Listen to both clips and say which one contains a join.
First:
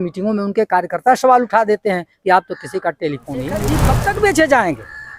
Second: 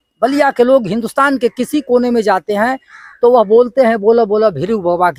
first; 1 cut; at 3.8 s

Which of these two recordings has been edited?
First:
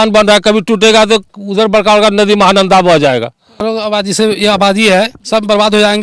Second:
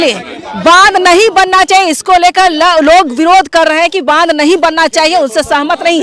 first; 1 cut; at 3.7 s

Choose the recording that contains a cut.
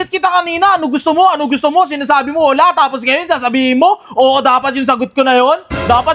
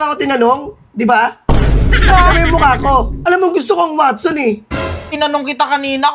second; 2 cuts; at 3.2 s, 5.1 s

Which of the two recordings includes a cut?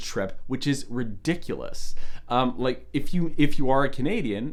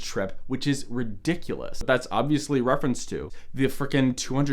second; 2 cuts; at 1.8 s, 3.4 s

